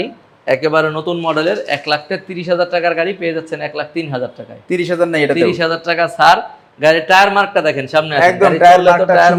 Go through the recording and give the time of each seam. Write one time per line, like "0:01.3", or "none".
none